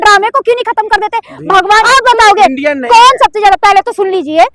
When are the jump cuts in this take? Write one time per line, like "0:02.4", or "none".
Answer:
0:01.9